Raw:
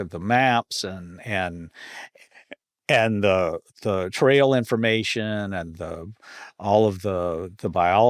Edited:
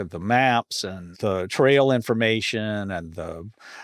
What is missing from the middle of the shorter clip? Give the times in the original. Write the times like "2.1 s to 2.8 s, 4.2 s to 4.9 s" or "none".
1.1 s to 3.7 s